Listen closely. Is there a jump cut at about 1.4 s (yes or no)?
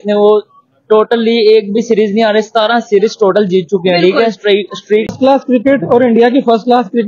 no